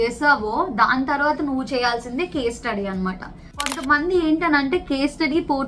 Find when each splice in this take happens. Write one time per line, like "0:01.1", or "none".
0:03.8